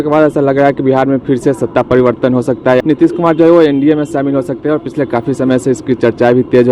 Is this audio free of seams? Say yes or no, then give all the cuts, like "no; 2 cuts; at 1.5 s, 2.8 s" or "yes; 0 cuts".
no; 1 cut; at 2.8 s